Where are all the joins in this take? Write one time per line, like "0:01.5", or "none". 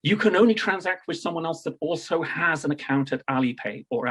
none